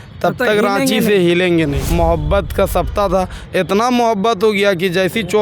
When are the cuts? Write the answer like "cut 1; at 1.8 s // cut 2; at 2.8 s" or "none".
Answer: cut 1; at 1.8 s